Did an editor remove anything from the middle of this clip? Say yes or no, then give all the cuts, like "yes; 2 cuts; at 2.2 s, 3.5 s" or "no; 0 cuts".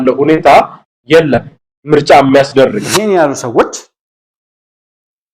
yes; 1 cut; at 2.9 s